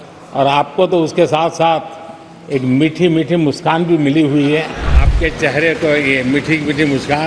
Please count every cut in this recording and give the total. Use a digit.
1